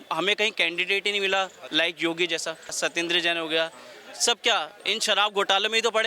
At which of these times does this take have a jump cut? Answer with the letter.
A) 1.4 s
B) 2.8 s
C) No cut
B